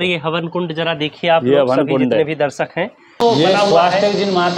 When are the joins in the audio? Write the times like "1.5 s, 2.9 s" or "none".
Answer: 3.2 s